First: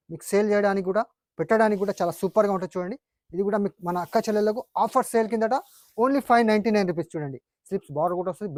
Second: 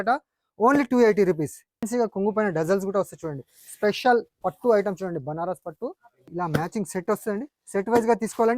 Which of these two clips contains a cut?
second; 2 cuts; at 1.9 s, 6.3 s

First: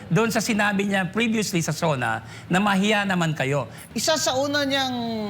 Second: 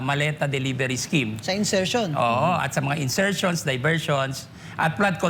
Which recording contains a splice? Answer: first; 1 cut; at 3.8 s

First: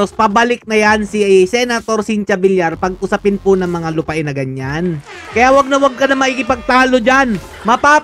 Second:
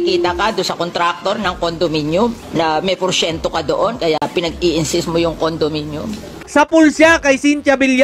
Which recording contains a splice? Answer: first; 1 cut; at 5.1 s

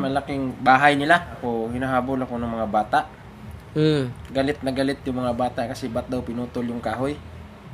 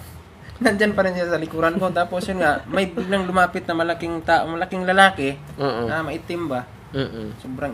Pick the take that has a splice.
first; 1 cut; at 1.3 s

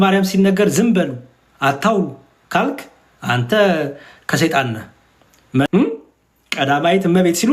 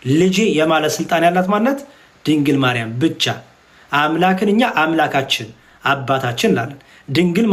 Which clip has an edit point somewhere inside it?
first; 1 cut; at 5.7 s

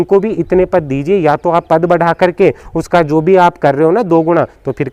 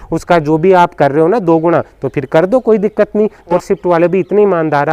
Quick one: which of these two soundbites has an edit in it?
second; 1 cut; at 3.5 s

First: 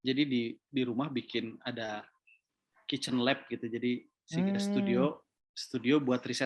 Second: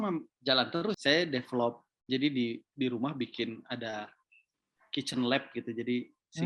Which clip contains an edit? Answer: second; 1 cut; at 1.0 s

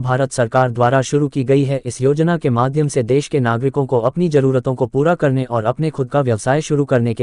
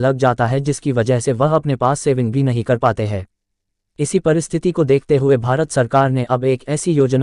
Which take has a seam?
second; 1 cut; at 3.8 s

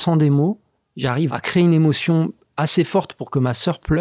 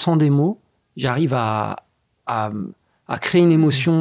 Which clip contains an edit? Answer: first; 1 cut; at 1.3 s

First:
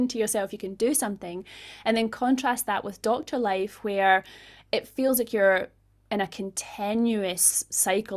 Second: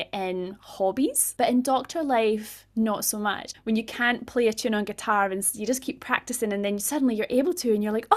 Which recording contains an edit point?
second; 2 cuts; at 1.2 s, 3.5 s

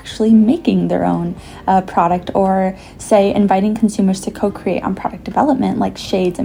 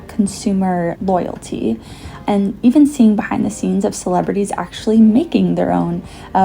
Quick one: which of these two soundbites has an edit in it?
second; 2 cuts; at 1.0 s, 2.1 s

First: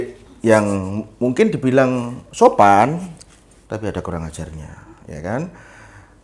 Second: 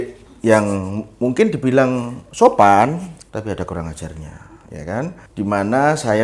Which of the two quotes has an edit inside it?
second; 2 cuts; at 3.2 s, 5.2 s

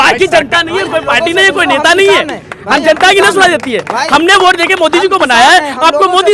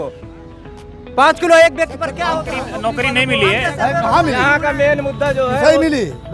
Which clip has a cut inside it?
second; 1 cut; at 2.2 s

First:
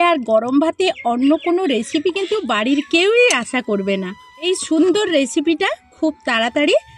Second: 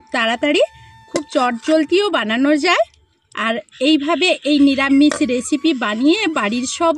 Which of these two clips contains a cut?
first; 1 cut; at 4.5 s

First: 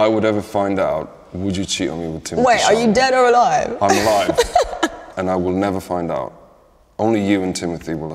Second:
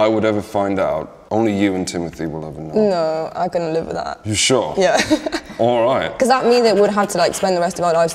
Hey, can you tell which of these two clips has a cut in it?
second; 1 cut; at 1.1 s

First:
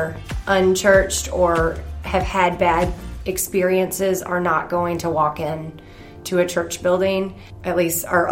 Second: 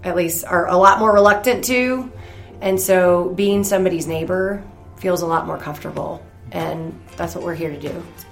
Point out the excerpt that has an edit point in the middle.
second; 1 cut; at 7.0 s

